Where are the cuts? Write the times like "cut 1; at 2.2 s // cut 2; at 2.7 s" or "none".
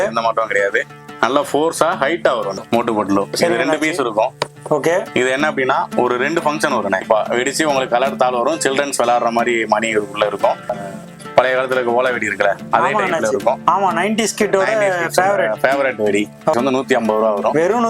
cut 1; at 2.6 s // cut 2; at 7.0 s // cut 3; at 10.7 s // cut 4; at 16.5 s